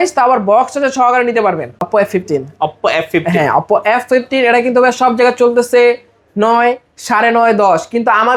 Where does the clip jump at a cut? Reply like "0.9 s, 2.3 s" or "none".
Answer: 1.9 s